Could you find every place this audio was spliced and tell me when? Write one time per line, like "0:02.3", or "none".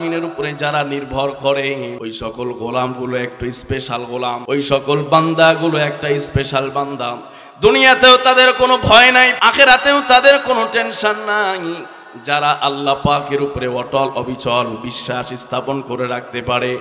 0:02.0
0:04.4
0:09.4